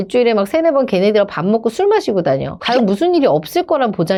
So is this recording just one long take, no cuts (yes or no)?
yes